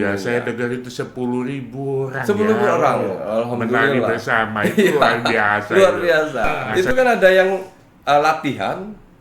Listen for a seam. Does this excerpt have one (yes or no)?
yes